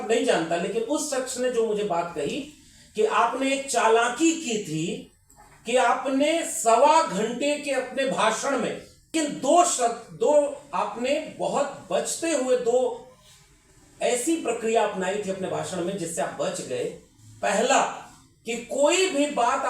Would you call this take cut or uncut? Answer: cut